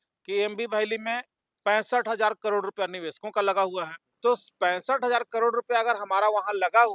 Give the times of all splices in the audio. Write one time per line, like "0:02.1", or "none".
0:04.0